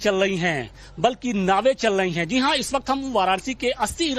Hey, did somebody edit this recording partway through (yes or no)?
no